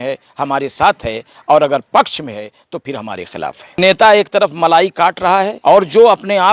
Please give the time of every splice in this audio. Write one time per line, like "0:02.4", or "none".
0:03.8
0:05.5